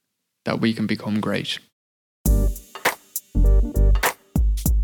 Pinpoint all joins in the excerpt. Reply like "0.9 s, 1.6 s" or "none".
2.1 s